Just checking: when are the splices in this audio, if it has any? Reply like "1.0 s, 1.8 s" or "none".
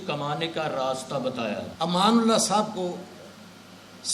1.7 s